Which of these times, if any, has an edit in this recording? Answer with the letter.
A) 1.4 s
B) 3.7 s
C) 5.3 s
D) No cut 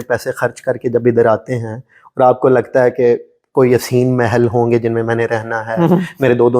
D